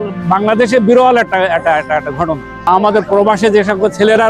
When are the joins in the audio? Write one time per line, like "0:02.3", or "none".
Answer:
0:02.5

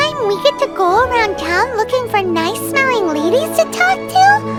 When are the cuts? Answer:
none

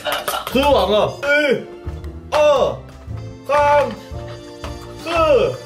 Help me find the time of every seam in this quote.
0:01.2

